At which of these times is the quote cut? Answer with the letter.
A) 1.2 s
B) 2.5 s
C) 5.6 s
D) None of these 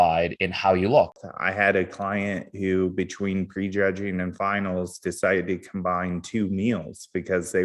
A